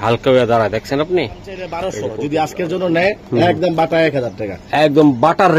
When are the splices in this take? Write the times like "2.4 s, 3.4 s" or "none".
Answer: 1.7 s